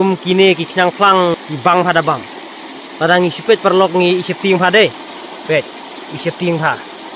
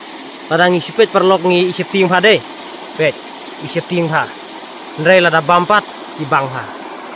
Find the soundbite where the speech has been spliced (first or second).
first